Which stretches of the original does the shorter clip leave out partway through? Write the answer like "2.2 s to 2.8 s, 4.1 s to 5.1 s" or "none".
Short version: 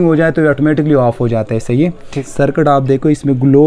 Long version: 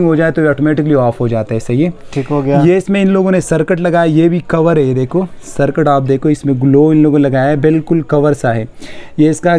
2.2 s to 5.4 s